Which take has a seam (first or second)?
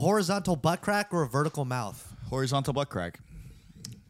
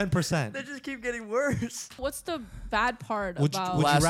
second